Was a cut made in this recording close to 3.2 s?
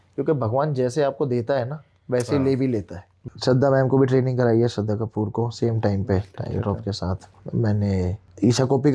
yes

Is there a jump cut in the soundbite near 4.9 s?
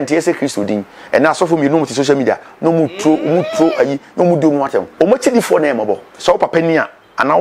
yes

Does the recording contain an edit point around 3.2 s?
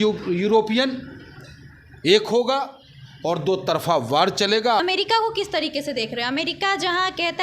no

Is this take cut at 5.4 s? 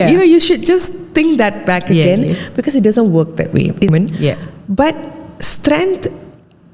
no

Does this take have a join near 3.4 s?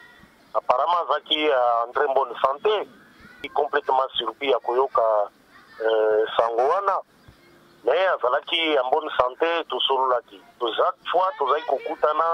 yes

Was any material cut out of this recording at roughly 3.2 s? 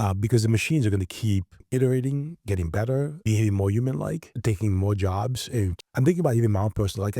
yes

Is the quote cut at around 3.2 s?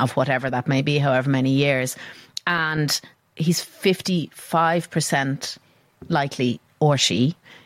yes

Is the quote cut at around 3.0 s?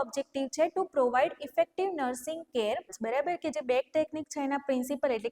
yes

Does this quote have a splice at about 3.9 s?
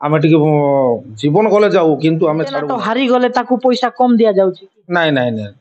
no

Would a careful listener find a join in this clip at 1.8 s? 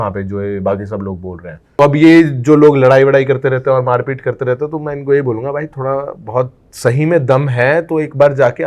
yes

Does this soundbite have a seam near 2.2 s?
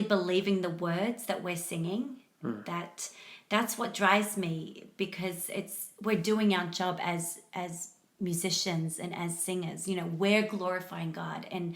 no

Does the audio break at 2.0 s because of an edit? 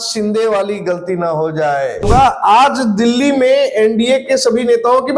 yes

